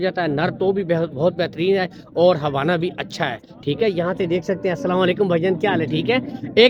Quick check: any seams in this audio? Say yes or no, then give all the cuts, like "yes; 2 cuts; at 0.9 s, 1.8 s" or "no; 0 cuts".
no; 0 cuts